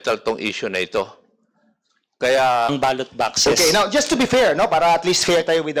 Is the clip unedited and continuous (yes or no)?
no